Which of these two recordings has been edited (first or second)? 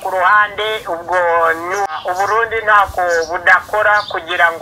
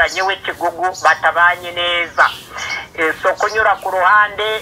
first